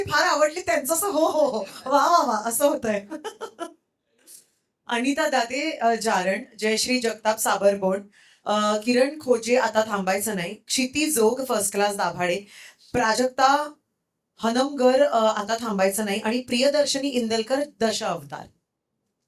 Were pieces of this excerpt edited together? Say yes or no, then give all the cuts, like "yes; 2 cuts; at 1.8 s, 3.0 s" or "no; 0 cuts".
no; 0 cuts